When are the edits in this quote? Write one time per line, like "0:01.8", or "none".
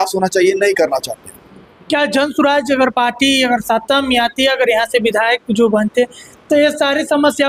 none